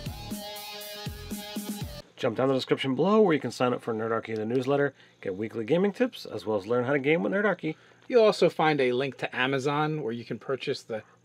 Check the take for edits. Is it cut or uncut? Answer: cut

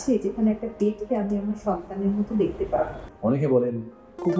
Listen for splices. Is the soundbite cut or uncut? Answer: cut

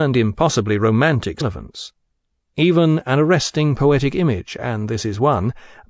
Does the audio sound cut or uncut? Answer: uncut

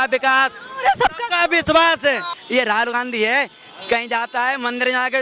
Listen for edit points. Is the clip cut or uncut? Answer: cut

